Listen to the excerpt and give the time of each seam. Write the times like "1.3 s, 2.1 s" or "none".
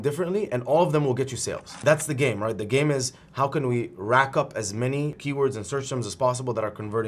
none